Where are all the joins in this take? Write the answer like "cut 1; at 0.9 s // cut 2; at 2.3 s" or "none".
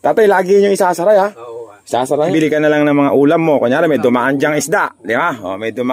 cut 1; at 2.3 s